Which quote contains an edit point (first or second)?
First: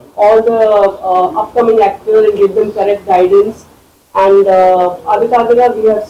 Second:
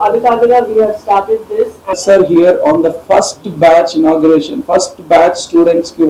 second